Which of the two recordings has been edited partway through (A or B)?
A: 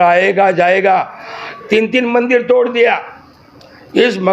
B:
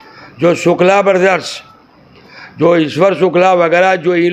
A